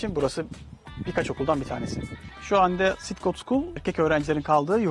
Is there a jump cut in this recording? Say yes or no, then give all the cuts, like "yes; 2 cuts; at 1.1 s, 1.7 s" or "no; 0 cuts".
yes; 1 cut; at 2.2 s